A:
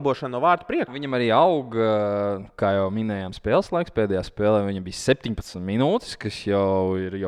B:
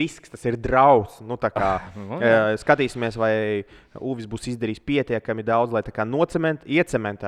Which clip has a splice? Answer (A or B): A